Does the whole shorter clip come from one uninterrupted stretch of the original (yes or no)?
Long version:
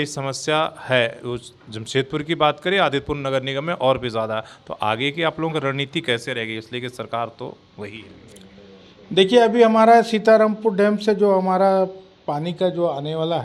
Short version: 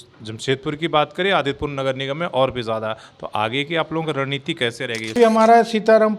no